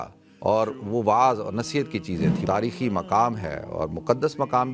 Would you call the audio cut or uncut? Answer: cut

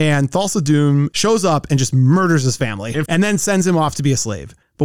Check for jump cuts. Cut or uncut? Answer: cut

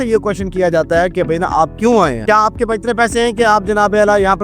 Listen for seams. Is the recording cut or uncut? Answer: cut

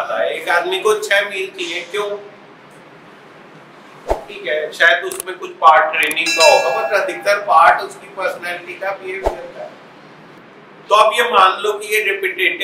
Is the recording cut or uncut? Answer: cut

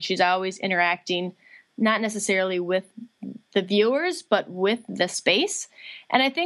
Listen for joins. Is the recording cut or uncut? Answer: uncut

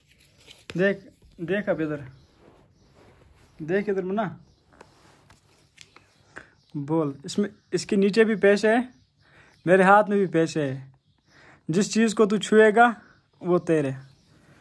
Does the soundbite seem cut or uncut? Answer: uncut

